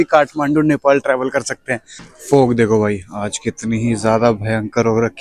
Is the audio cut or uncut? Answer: cut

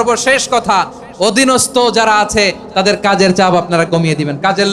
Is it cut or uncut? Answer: uncut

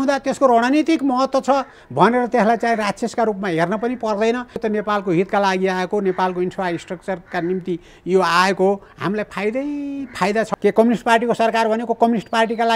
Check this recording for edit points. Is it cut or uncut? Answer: cut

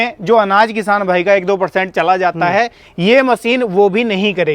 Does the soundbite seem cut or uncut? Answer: uncut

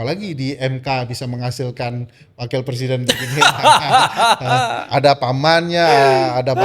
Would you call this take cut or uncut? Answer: uncut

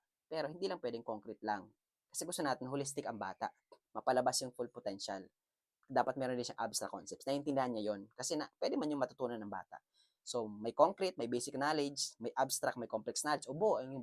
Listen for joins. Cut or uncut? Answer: uncut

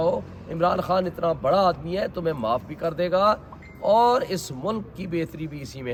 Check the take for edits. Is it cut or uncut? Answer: uncut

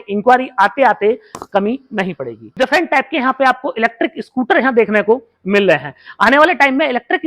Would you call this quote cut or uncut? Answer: cut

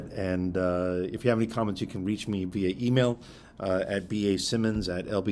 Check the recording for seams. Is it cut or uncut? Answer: uncut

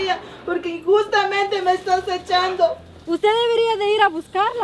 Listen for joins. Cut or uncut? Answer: cut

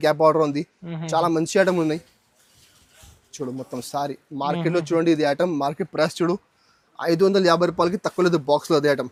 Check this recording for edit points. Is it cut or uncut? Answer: uncut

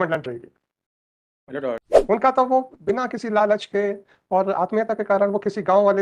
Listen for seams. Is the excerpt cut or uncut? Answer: cut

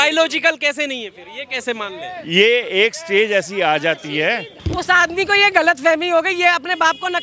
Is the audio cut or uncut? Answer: cut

